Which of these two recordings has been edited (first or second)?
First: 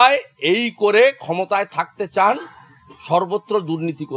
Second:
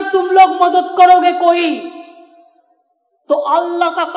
second